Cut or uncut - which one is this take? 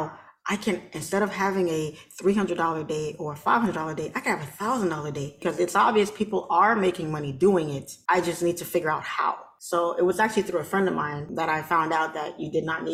cut